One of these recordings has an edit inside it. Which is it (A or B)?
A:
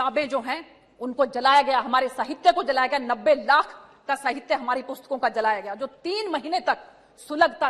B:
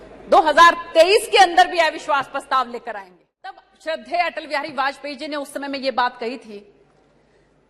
B